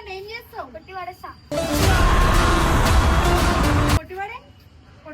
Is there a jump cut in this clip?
yes; 2 cuts; at 1.4 s, 4.0 s

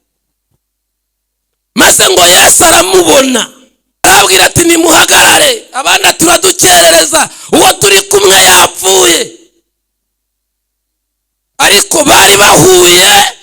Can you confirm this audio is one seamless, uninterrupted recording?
no; 1 cut; at 4.0 s

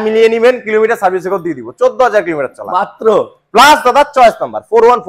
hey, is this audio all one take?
yes; 0 cuts

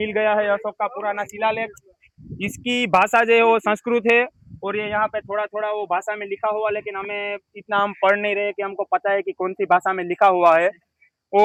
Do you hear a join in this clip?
no; 0 cuts

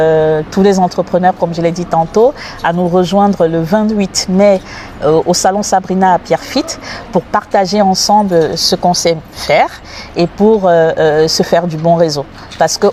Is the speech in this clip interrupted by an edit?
no; 0 cuts

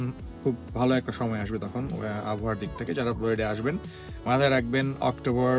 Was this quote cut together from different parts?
no; 0 cuts

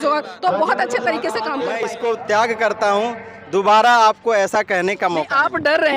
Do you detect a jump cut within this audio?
yes; 1 cut; at 1.8 s

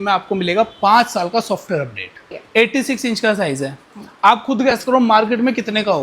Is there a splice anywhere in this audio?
yes; 1 cut; at 2.3 s

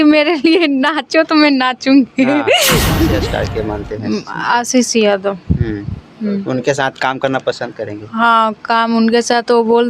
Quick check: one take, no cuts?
no; 1 cut; at 3.0 s

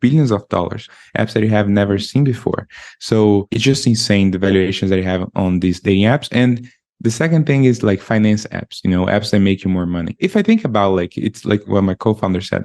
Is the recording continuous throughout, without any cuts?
no; 4 cuts; at 0.9 s, 3.5 s, 10.1 s, 11.7 s

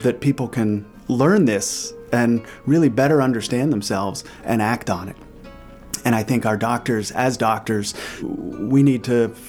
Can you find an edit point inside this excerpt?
yes; 2 cuts; at 0.9 s, 8.1 s

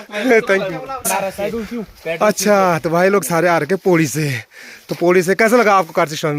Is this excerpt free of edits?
no; 1 cut; at 1.1 s

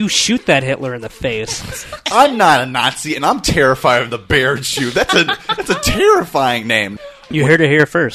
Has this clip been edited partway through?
yes; 2 cuts; at 2.0 s, 7.2 s

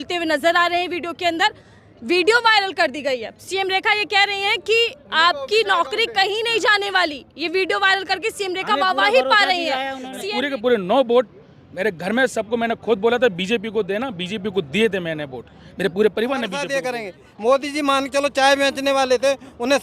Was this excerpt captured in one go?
no; 2 cuts; at 10.2 s, 16.7 s

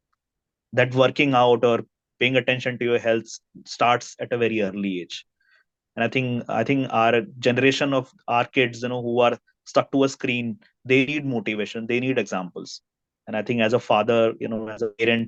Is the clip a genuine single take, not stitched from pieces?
yes; 0 cuts

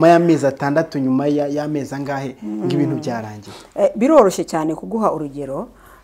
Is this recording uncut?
yes; 0 cuts

